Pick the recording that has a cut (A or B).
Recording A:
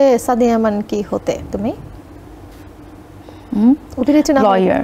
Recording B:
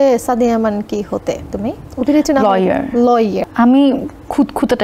B